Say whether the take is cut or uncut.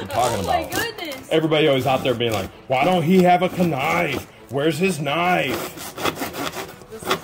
uncut